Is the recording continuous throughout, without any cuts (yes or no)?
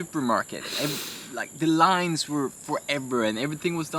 yes